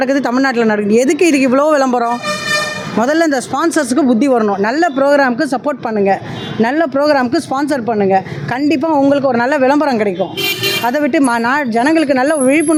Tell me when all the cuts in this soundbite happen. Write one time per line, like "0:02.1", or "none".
none